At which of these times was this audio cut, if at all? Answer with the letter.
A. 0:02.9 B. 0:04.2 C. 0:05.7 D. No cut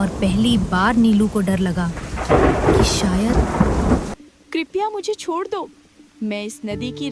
B